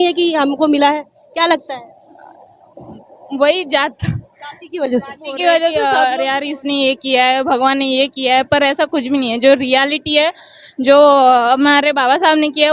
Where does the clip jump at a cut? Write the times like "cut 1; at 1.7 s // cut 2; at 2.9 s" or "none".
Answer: cut 1; at 5.8 s